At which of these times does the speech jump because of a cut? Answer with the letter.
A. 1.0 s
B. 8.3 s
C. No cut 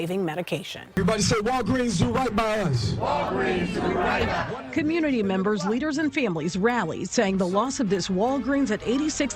A